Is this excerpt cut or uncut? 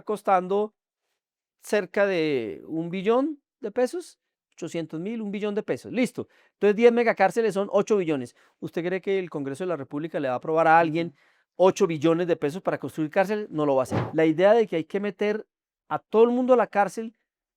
cut